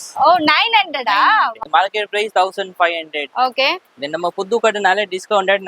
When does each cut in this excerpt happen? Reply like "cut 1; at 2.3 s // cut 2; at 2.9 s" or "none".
cut 1; at 1.6 s